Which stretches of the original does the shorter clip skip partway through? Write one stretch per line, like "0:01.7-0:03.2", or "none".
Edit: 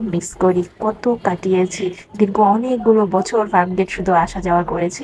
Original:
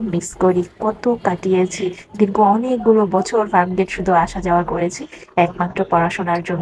none